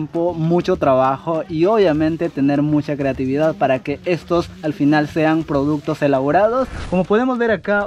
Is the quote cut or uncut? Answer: cut